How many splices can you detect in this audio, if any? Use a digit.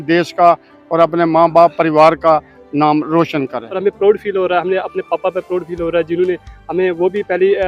1